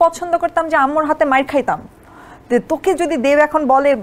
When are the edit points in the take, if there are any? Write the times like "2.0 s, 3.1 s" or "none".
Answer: none